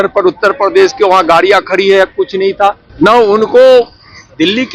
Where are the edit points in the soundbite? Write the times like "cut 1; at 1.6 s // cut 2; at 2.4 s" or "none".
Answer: cut 1; at 2.9 s

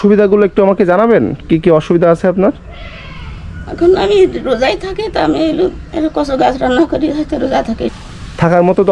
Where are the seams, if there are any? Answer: cut 1; at 7.9 s

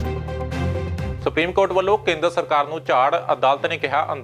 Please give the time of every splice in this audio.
cut 1; at 1.1 s

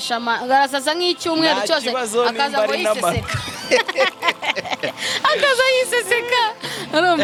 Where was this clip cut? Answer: none

